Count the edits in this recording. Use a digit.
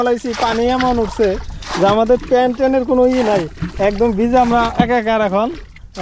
0